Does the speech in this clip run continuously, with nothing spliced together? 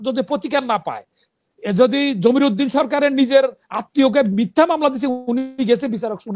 yes; 0 cuts

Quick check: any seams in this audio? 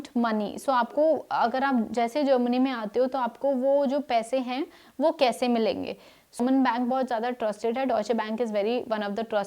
yes; 1 cut; at 6.4 s

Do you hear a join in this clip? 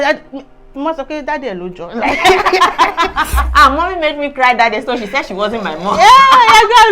yes; 1 cut; at 3.4 s

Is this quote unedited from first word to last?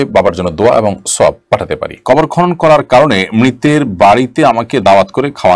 no; 1 cut; at 1.9 s

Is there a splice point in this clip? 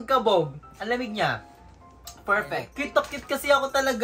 yes; 1 cut; at 2.6 s

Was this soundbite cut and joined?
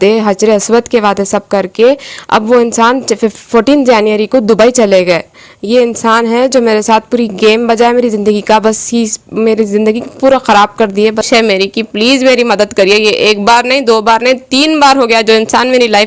yes; 1 cut; at 11.3 s

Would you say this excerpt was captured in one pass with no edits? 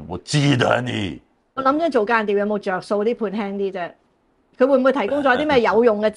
no; 1 cut; at 1.5 s

